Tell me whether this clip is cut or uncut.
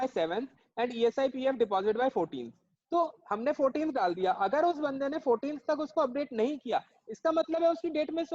uncut